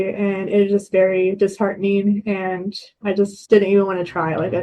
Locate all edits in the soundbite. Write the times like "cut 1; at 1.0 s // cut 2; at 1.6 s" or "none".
cut 1; at 3.4 s

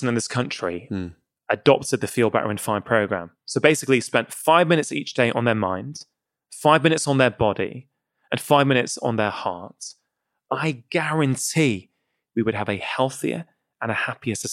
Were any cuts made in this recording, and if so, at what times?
none

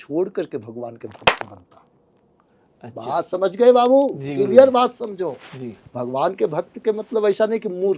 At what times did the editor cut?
none

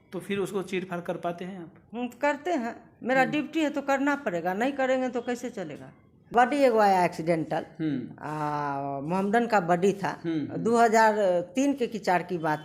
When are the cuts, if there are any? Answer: cut 1; at 6.3 s

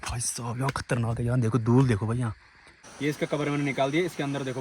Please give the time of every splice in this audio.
cut 1; at 2.8 s

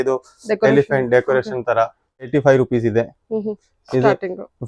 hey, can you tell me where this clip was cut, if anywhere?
cut 1; at 2.3 s

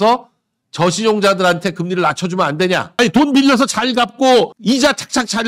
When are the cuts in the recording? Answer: cut 1; at 2.9 s

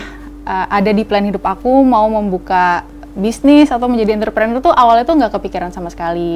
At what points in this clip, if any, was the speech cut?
none

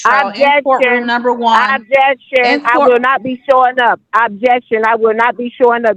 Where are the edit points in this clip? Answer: none

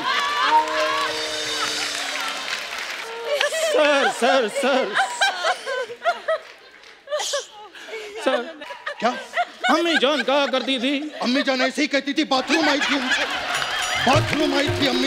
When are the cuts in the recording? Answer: cut 1; at 3.0 s // cut 2; at 8.6 s

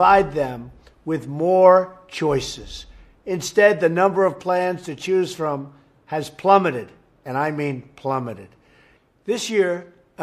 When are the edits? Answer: cut 1; at 8.2 s

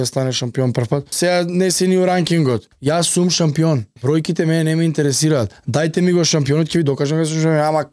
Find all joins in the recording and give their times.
cut 1; at 1.1 s // cut 2; at 2.7 s // cut 3; at 3.9 s // cut 4; at 5.6 s

